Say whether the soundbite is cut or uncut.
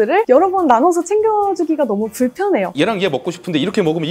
cut